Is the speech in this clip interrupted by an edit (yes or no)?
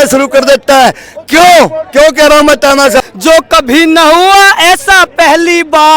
yes